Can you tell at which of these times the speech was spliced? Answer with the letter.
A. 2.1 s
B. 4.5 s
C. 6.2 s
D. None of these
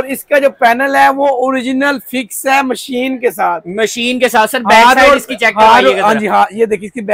D